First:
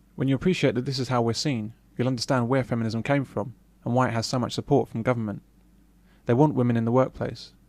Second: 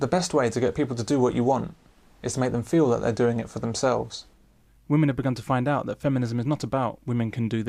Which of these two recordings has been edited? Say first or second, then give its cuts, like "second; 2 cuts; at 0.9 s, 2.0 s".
first; 1 cut; at 4.6 s